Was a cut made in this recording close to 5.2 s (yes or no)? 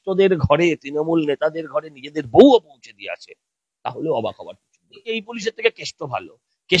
yes